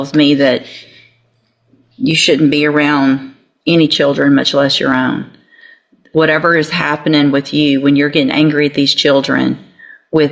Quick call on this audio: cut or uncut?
uncut